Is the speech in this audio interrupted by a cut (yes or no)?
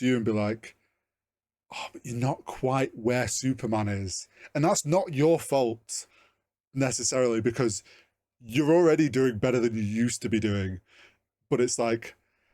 no